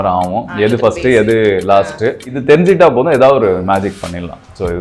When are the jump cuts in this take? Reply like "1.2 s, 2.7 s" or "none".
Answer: 2.3 s